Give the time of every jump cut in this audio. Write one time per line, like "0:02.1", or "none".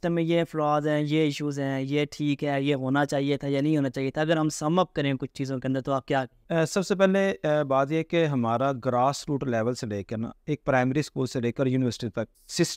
none